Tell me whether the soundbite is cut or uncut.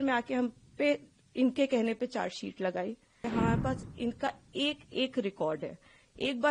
cut